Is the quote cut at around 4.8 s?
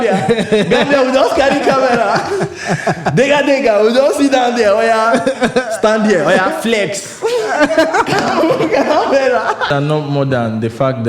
no; 1 cut; at 9.7 s

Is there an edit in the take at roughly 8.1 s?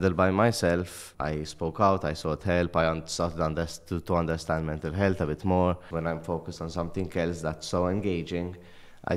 no; 2 cuts; at 1.1 s, 5.9 s

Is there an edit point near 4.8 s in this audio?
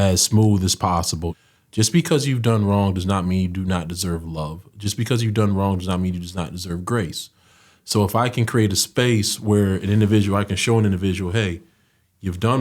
no; 1 cut; at 1.3 s

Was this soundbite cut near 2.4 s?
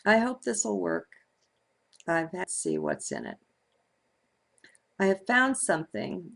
no; 0 cuts

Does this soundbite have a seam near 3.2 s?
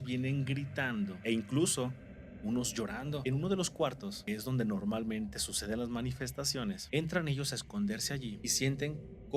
yes; 5 cuts; at 1.2 s, 3.2 s, 4.1 s, 6.8 s, 8.4 s

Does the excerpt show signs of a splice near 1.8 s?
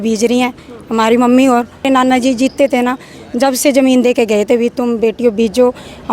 yes; 1 cut; at 1.8 s

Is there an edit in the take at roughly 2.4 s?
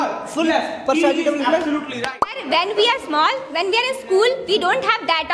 yes; 1 cut; at 2.4 s

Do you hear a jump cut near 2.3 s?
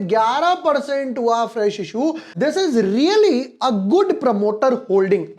yes; 1 cut; at 2.3 s

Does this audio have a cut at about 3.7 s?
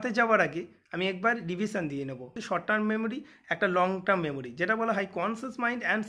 no; 1 cut; at 2.3 s

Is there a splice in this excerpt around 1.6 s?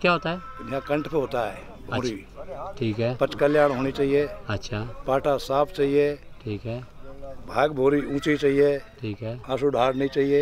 no; 0 cuts

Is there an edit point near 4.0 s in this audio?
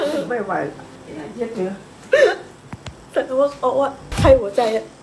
no; 1 cut; at 0.9 s

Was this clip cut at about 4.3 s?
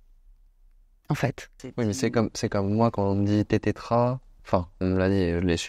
yes; 2 cuts; at 1.6 s, 4.3 s

